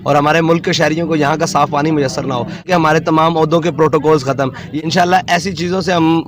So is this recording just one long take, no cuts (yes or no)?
no